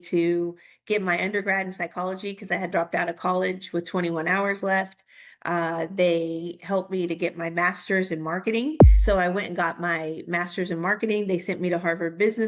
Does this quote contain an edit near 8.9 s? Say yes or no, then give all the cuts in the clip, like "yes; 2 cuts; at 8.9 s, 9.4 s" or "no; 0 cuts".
yes; 1 cut; at 8.9 s